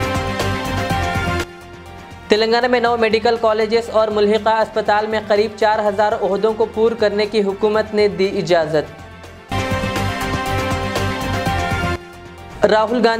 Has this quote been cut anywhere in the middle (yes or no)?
yes